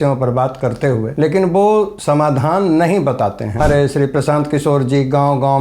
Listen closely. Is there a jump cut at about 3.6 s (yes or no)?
yes